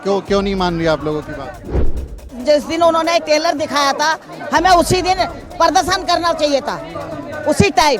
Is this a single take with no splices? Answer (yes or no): no